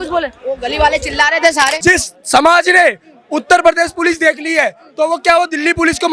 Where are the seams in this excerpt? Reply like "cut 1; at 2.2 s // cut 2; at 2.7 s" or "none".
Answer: cut 1; at 1.8 s